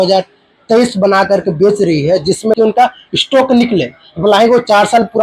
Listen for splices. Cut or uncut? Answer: cut